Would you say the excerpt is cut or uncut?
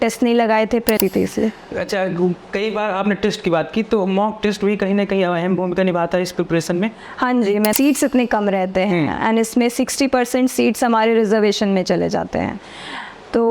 cut